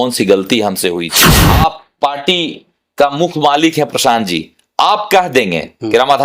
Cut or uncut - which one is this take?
cut